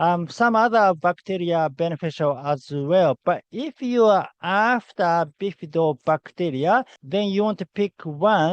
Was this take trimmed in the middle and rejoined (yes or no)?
yes